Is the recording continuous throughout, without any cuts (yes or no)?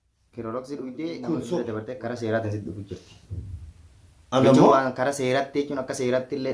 no